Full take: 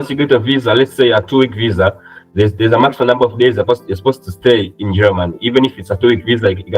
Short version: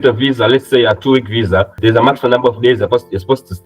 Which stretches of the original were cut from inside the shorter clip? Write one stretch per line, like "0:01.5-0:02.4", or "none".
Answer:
0:02.0-0:02.5